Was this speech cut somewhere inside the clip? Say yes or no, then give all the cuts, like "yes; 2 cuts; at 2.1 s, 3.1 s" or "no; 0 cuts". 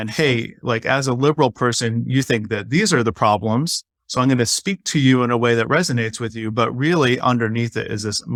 no; 0 cuts